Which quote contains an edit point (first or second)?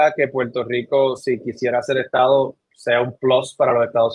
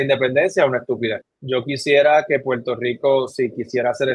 second